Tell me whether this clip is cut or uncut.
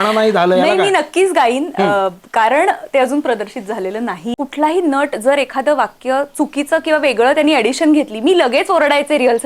cut